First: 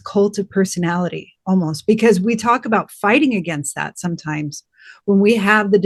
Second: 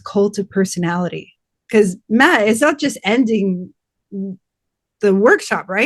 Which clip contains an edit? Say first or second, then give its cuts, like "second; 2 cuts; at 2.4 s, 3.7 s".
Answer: second; 1 cut; at 1.3 s